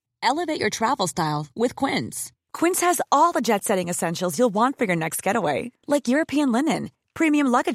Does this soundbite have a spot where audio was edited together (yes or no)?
no